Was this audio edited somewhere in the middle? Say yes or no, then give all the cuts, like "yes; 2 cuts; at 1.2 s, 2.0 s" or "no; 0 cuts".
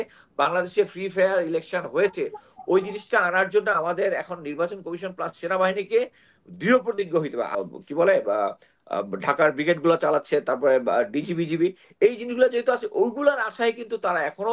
yes; 1 cut; at 7.5 s